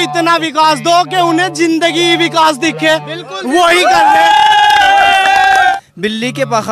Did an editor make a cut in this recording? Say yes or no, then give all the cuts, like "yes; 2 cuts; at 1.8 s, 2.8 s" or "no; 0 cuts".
yes; 1 cut; at 5.7 s